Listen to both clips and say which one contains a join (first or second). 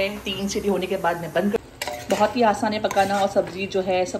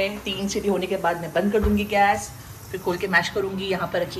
first